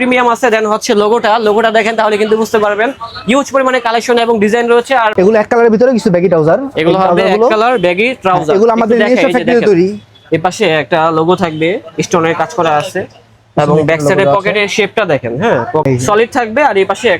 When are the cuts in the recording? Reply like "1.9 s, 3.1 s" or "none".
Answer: 5.1 s, 15.8 s